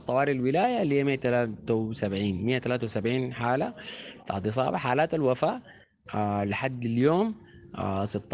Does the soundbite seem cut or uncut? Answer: uncut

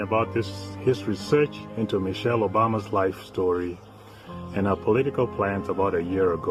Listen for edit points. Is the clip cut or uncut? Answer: uncut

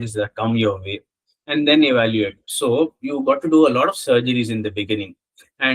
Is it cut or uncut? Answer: cut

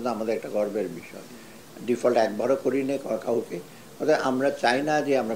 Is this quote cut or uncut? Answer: uncut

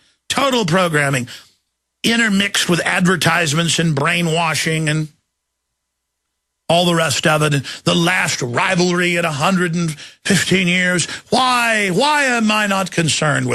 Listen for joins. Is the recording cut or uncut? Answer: uncut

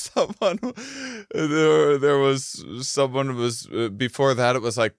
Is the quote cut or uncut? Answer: uncut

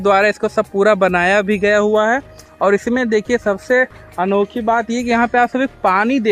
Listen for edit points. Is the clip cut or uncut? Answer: uncut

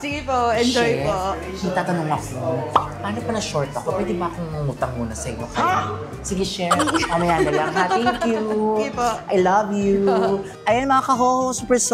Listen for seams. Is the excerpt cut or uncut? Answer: cut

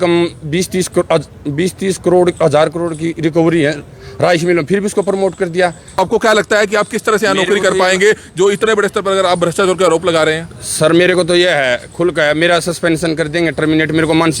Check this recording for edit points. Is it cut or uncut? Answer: cut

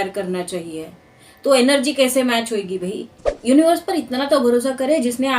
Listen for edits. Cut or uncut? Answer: cut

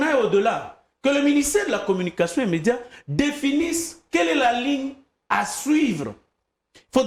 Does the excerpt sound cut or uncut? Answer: uncut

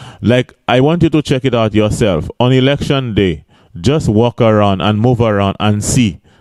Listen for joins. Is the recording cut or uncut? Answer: uncut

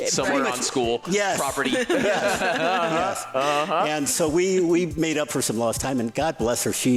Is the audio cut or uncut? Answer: uncut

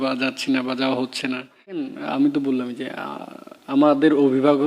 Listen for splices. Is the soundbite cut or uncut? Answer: cut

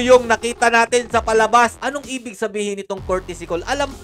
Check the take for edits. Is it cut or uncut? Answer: cut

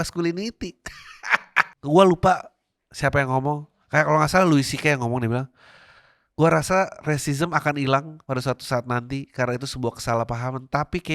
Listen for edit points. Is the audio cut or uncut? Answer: cut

